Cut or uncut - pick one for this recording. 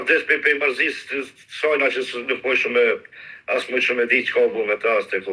uncut